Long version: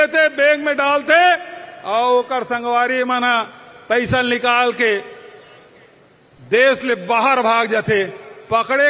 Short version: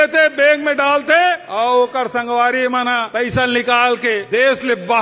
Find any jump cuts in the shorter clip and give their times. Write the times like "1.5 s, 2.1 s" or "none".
1.4 s, 3.1 s, 4.2 s